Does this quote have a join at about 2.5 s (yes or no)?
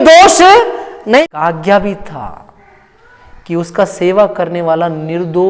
no